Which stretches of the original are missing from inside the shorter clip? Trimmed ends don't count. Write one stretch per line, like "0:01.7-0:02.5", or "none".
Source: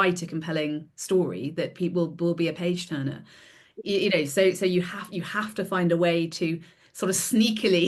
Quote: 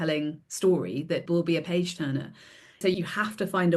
0:01.7-0:02.1
0:03.7-0:05.0